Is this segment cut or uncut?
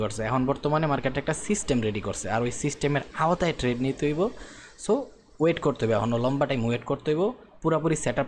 uncut